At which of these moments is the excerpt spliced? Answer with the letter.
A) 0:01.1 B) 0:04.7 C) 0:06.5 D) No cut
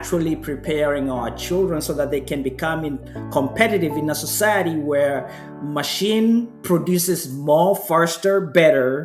C